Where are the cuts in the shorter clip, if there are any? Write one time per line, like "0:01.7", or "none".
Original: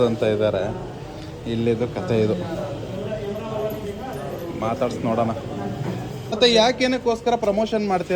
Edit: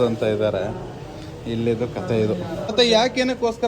0:02.6